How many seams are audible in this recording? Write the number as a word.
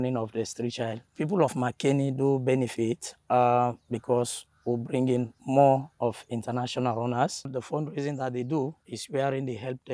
two